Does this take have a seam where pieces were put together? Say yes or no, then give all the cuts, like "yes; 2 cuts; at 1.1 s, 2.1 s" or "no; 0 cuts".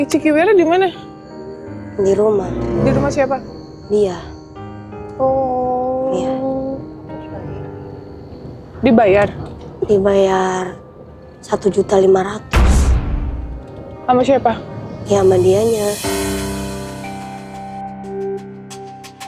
no; 0 cuts